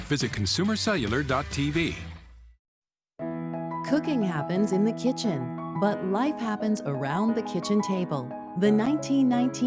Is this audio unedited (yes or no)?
no